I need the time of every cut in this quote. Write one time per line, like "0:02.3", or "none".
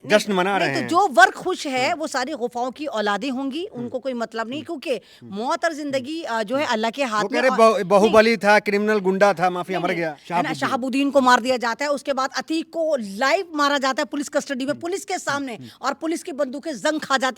0:10.2